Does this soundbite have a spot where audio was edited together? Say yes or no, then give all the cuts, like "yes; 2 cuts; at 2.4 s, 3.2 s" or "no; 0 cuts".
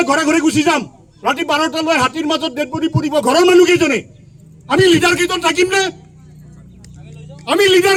no; 0 cuts